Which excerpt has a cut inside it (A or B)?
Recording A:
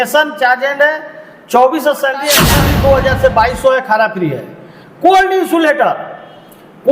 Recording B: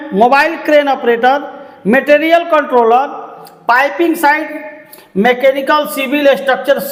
A